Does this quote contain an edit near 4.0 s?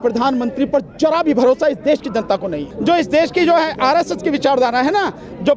no; 1 cut; at 2.7 s

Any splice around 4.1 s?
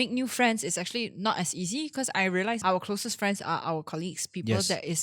no; 1 cut; at 2.6 s

